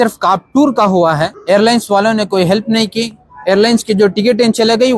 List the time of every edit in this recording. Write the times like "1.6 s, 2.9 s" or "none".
1.3 s